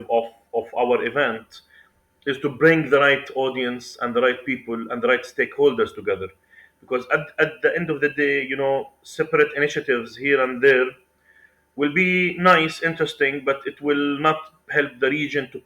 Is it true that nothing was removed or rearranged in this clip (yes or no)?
yes